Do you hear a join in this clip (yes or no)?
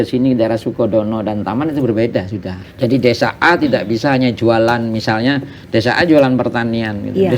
yes